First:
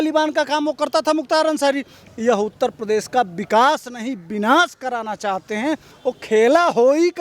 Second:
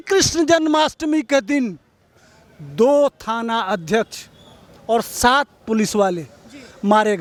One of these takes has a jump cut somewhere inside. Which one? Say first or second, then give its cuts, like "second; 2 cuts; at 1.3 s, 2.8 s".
first; 2 cuts; at 2.0 s, 5.9 s